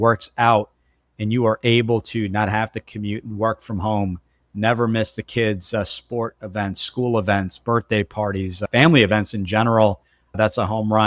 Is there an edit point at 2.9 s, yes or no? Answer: no